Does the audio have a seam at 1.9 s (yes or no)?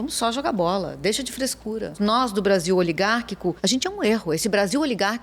yes